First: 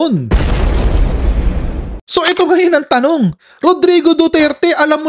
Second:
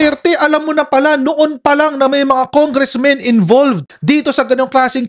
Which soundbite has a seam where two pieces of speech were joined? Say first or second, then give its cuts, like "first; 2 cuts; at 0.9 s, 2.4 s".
first; 1 cut; at 1.9 s